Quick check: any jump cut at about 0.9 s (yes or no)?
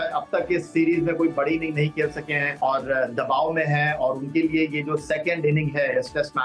no